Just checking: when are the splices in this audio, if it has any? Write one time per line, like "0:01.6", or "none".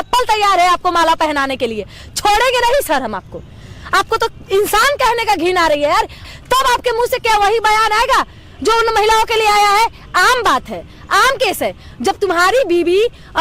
none